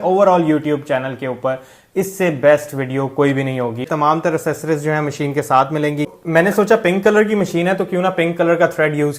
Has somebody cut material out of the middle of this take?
yes; 2 cuts; at 3.9 s, 6.1 s

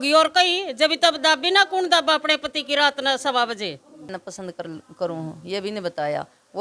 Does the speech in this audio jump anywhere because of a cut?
yes; 1 cut; at 4.2 s

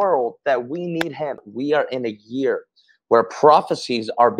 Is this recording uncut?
no; 1 cut; at 1.5 s

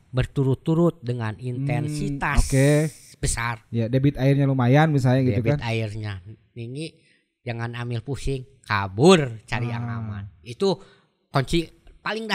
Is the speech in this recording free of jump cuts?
yes; 0 cuts

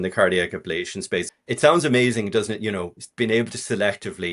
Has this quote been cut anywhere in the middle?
yes; 1 cut; at 1.3 s

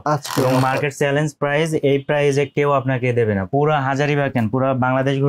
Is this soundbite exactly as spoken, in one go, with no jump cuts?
no; 1 cut; at 3.5 s

